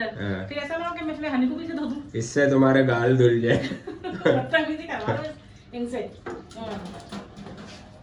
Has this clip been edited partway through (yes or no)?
no